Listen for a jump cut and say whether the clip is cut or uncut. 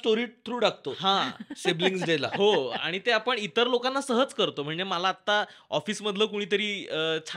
uncut